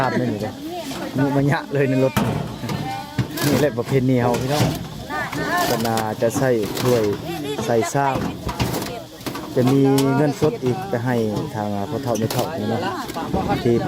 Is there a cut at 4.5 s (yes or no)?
no